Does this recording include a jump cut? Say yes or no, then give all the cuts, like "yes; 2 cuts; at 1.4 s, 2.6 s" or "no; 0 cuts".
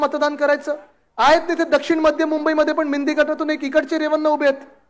no; 0 cuts